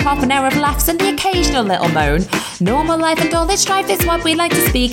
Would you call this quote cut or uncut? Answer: uncut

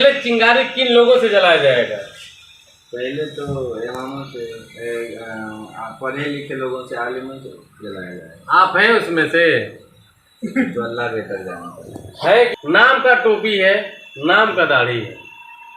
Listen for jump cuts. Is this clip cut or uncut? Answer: cut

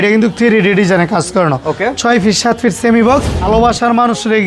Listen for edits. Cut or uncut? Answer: cut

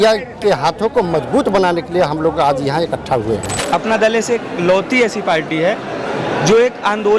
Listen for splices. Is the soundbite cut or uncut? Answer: cut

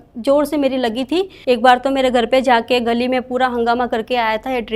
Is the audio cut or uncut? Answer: cut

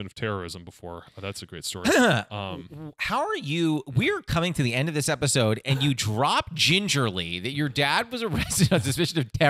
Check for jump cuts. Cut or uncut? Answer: uncut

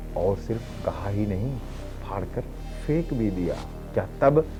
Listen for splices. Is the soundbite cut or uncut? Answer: uncut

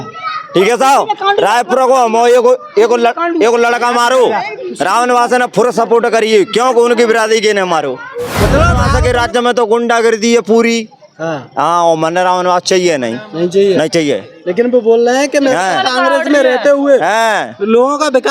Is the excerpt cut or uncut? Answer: cut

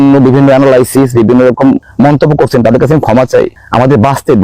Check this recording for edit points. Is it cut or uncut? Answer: cut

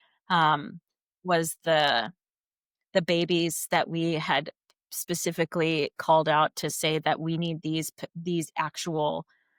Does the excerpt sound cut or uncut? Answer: uncut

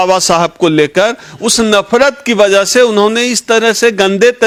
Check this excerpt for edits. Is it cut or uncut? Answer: uncut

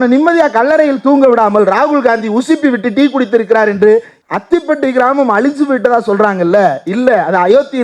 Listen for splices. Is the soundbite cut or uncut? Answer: cut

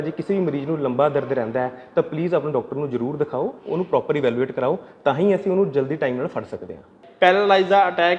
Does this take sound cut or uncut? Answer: cut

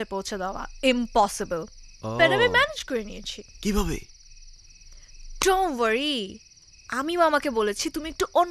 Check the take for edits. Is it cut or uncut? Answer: uncut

